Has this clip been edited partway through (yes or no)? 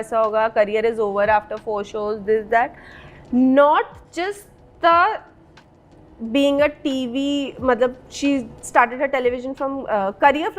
no